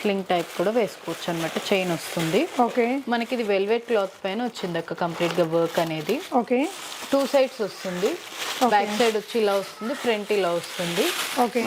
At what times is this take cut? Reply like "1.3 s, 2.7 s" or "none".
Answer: none